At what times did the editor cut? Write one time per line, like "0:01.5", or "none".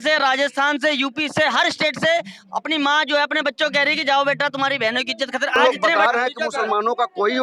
0:05.6